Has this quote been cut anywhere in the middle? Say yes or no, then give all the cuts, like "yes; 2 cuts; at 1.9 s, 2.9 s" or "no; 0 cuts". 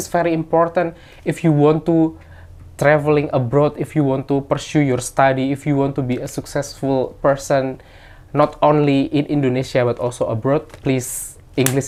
no; 0 cuts